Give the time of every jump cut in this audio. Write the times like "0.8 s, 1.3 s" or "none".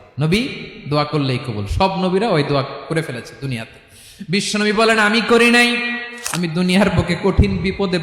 6.0 s